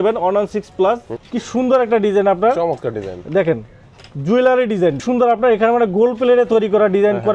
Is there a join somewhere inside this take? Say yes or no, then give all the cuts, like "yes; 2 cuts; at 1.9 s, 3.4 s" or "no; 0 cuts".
yes; 2 cuts; at 1.1 s, 5.0 s